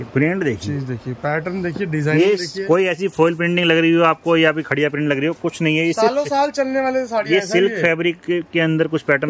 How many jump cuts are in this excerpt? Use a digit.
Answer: 0